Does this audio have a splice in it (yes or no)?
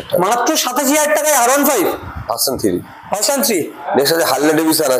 yes